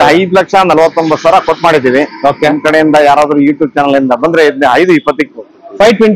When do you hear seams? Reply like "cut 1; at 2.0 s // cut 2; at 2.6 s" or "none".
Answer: none